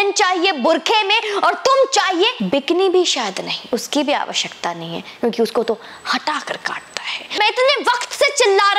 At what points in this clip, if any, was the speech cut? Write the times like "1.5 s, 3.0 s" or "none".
2.4 s, 3.5 s, 7.4 s